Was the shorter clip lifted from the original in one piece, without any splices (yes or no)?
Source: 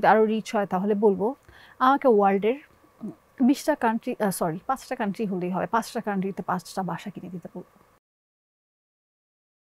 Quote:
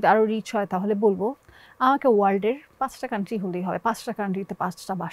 no